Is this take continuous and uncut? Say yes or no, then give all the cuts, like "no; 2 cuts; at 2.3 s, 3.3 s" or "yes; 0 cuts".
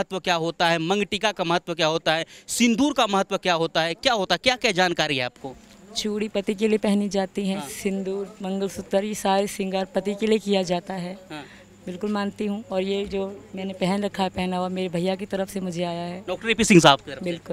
yes; 0 cuts